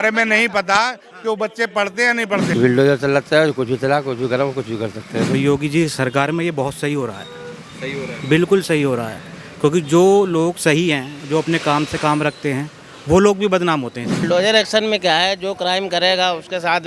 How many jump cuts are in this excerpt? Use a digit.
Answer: 3